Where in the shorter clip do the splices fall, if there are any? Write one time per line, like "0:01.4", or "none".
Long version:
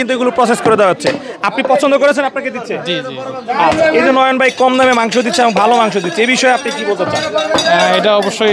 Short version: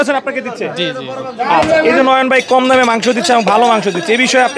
none